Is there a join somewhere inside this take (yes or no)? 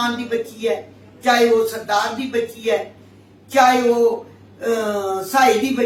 no